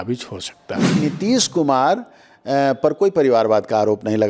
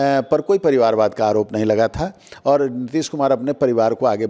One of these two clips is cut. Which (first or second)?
first